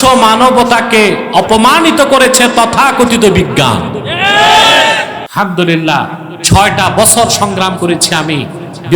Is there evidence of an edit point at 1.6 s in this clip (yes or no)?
no